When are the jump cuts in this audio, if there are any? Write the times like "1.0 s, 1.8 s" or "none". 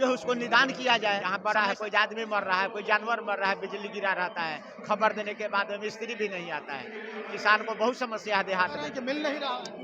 1.3 s, 9.0 s